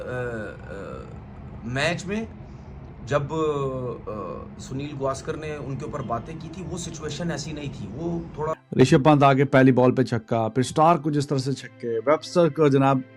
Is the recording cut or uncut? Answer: cut